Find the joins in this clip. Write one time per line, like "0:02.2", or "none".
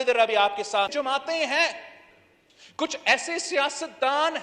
0:00.9